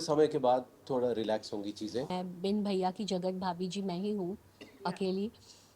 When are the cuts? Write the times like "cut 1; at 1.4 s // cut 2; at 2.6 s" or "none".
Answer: cut 1; at 2.1 s